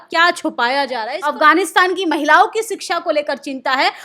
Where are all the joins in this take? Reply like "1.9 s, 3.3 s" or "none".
1.1 s

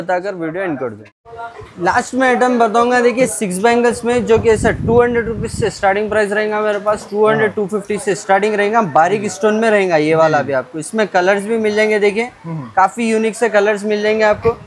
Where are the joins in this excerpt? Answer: none

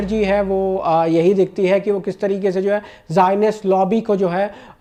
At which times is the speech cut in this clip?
none

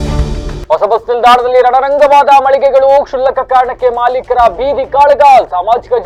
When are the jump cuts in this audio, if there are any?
none

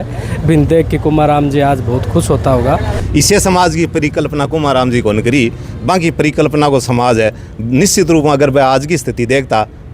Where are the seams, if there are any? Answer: 3.0 s

